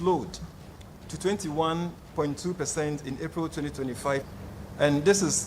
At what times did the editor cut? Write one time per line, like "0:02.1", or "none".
0:04.3